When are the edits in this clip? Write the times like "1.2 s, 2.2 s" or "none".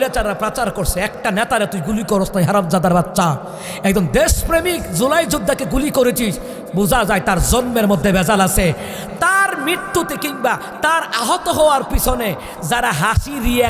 none